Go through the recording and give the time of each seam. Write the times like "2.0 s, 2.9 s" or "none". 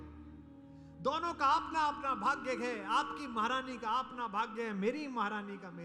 none